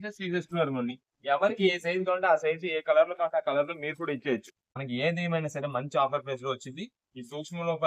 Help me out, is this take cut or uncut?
cut